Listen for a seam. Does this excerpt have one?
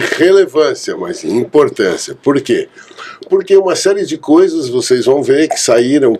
no; 0 cuts

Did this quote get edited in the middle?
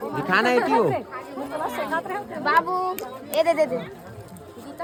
no; 0 cuts

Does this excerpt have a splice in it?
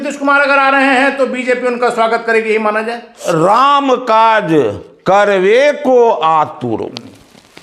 yes; 1 cut; at 3.2 s

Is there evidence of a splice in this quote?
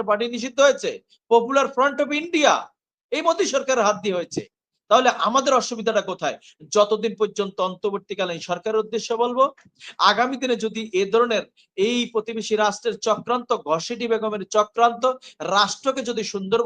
no; 0 cuts

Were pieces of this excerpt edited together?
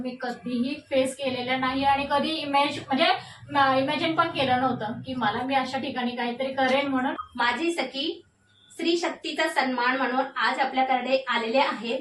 yes; 1 cut; at 7.1 s

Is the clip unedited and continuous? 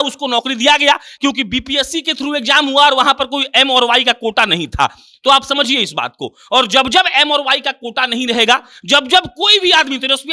yes; 0 cuts

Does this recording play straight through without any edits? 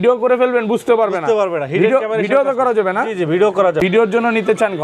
no; 1 cut; at 3.8 s

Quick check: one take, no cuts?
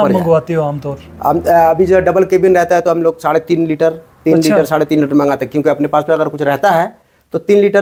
yes; 0 cuts

